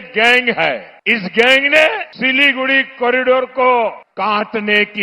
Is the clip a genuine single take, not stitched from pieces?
no; 3 cuts; at 0.9 s, 2.1 s, 4.0 s

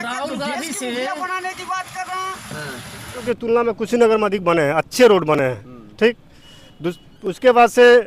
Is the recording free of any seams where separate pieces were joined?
no; 1 cut; at 3.3 s

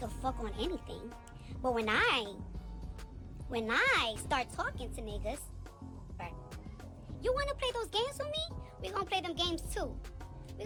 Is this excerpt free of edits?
yes; 0 cuts

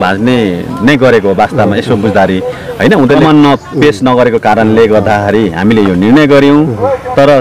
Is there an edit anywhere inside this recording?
yes; 1 cut; at 3.2 s

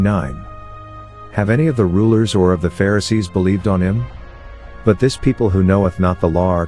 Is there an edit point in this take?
no; 0 cuts

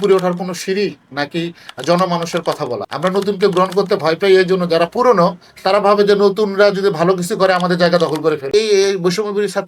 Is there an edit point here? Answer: yes; 2 cuts; at 2.9 s, 8.5 s

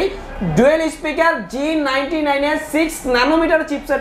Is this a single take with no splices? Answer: yes; 0 cuts

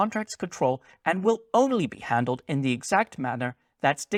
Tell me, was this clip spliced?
no; 0 cuts

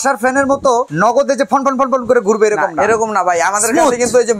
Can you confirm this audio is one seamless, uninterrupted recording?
no; 1 cut; at 0.9 s

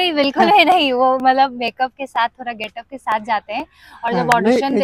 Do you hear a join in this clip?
no; 0 cuts

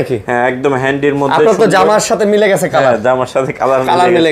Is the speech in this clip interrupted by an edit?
no; 0 cuts

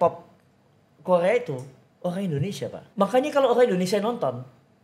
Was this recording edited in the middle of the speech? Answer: yes; 1 cut; at 2.8 s

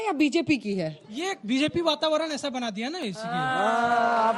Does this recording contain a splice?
yes; 1 cut; at 3.1 s

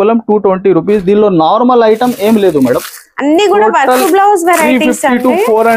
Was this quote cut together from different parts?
no; 0 cuts

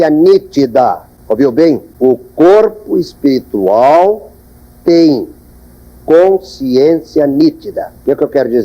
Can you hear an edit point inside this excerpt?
yes; 2 cuts; at 1.1 s, 1.9 s

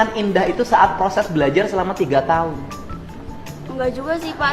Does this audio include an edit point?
no; 0 cuts

